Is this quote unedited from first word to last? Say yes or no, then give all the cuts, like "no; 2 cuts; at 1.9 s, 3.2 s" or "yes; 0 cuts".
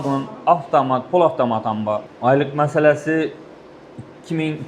no; 1 cut; at 2.1 s